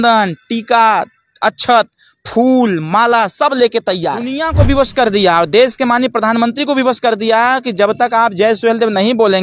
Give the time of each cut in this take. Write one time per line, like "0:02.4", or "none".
0:04.4